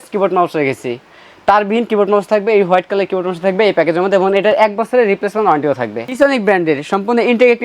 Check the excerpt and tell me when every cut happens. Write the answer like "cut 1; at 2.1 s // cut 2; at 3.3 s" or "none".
cut 1; at 6.1 s